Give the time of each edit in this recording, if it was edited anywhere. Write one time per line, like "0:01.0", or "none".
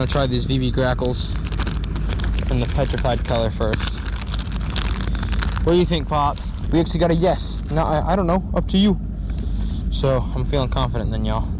none